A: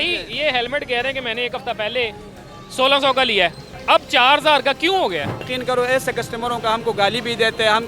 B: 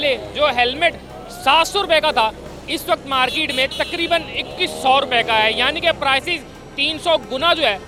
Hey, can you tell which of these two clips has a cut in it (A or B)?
A